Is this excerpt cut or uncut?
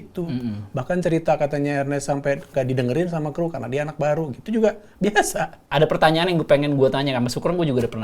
cut